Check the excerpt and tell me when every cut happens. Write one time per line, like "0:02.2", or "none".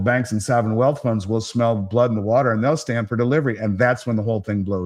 none